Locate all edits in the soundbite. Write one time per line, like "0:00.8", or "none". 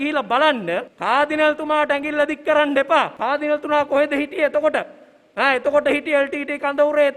0:00.9
0:03.1